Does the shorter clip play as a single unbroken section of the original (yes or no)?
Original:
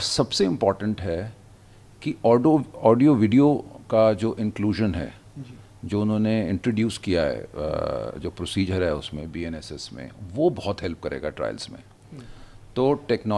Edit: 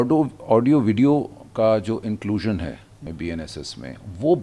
no